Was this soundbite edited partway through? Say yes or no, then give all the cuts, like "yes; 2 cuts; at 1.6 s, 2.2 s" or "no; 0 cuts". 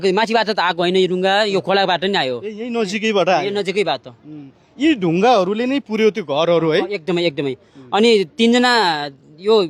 no; 0 cuts